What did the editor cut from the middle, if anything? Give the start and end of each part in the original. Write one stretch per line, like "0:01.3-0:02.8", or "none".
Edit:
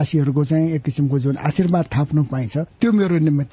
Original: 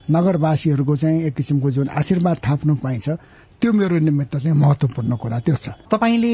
0:03.1-0:03.4